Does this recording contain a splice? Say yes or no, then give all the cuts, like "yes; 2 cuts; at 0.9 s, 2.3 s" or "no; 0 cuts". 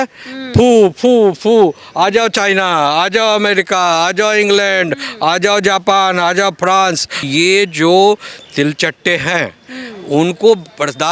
yes; 1 cut; at 7.3 s